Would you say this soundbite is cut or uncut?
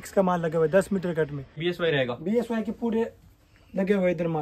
cut